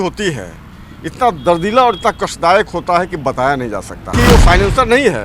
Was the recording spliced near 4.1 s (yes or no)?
yes